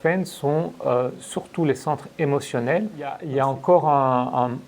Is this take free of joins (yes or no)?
no